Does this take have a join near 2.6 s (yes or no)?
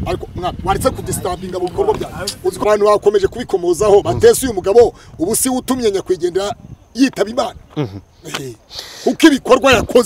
yes